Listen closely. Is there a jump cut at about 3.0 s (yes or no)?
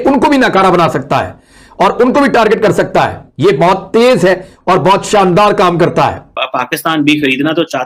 no